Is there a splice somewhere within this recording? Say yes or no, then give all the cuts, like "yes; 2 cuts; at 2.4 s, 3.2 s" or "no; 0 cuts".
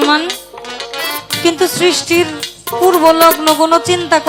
no; 0 cuts